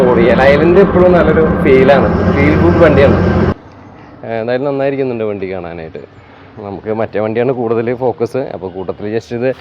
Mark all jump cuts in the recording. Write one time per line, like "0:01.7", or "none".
0:03.5